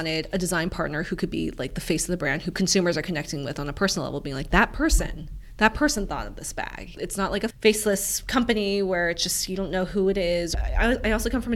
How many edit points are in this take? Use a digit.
3